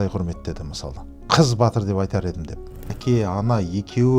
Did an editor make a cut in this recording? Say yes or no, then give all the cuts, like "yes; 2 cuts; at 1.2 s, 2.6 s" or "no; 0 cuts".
yes; 1 cut; at 3.0 s